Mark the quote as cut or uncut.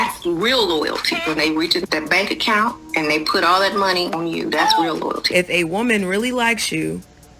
cut